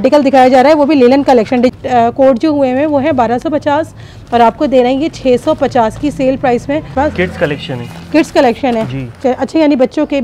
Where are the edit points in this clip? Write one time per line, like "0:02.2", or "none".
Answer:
0:01.7
0:06.9